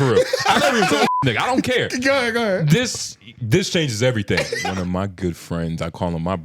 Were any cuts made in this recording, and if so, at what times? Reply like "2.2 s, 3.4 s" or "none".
4.6 s